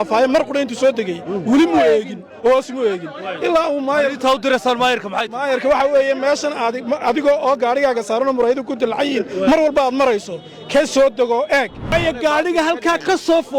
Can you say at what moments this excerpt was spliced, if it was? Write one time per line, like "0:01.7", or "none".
0:11.9

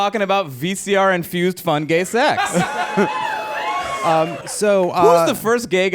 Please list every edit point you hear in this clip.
0:04.4

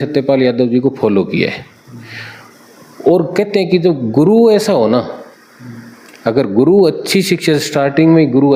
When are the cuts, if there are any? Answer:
none

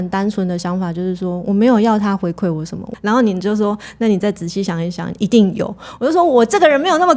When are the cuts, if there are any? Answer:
none

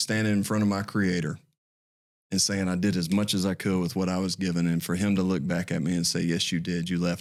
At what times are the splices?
none

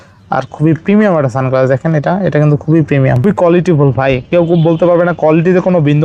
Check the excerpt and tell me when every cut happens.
0:03.2

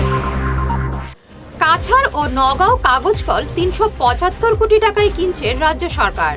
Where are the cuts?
0:00.9

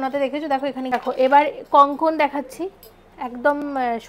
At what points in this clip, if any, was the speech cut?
0:00.9

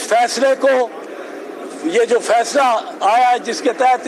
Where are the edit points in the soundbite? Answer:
none

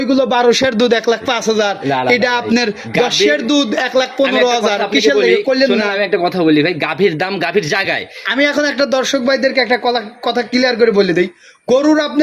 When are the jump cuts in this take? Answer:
none

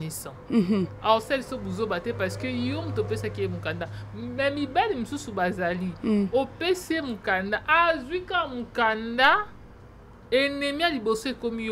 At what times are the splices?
none

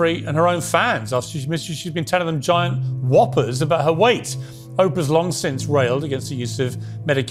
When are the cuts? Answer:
none

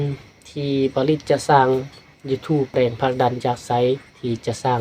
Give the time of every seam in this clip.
0:02.7

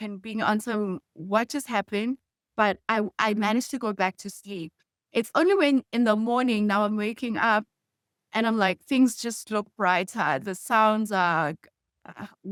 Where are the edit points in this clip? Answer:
none

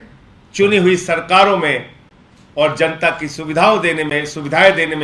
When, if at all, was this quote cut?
none

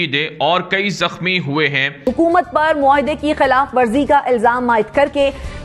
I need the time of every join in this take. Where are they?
0:02.1

